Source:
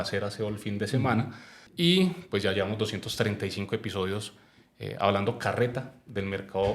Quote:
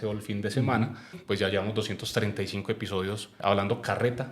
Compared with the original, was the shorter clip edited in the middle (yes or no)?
yes